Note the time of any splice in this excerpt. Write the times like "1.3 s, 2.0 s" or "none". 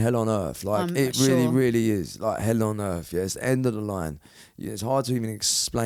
none